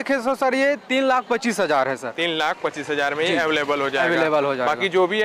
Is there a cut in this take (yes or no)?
no